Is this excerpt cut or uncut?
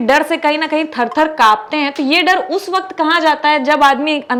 uncut